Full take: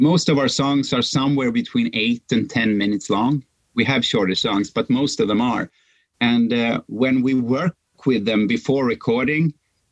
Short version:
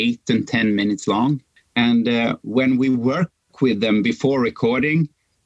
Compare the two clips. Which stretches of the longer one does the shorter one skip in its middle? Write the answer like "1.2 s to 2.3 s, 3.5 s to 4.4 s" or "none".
3.5 s to 6.0 s